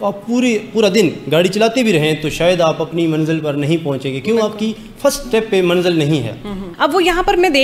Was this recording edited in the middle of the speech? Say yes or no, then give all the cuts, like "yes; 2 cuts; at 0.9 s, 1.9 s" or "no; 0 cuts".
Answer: yes; 1 cut; at 6.6 s